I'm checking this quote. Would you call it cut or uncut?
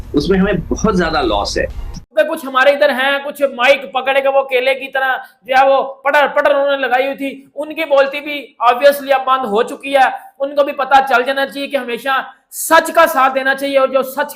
uncut